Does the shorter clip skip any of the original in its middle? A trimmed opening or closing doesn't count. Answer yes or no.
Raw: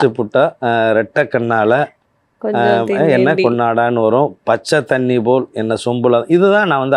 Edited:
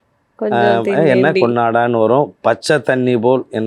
no